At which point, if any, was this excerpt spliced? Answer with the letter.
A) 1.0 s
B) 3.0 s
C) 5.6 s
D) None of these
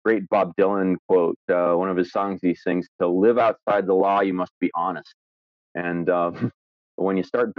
A